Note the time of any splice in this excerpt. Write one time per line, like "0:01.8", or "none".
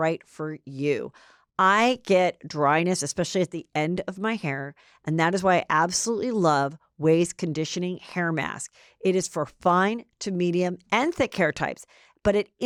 none